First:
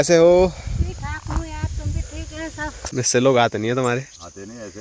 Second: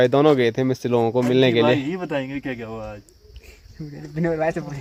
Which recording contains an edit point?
first; 1 cut; at 2.8 s

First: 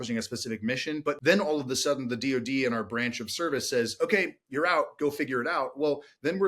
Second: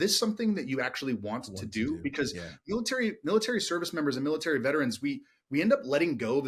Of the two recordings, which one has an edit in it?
first; 1 cut; at 1.1 s

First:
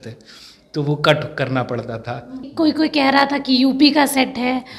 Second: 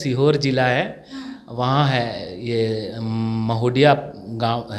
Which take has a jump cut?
first; 1 cut; at 2.5 s

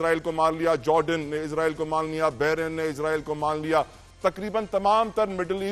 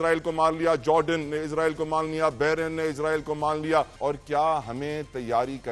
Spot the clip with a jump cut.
second; 1 cut; at 3.9 s

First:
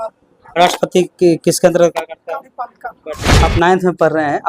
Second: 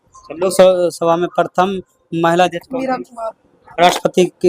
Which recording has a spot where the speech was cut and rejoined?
first; 1 cut; at 3.2 s

